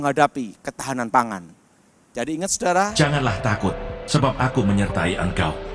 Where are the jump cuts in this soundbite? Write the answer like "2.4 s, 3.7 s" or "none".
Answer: 2.9 s